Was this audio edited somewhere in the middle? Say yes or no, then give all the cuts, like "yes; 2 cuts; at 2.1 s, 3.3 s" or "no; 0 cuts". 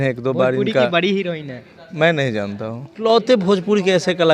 yes; 1 cut; at 3.0 s